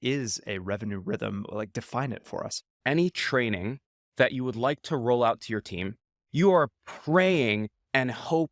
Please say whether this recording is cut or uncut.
cut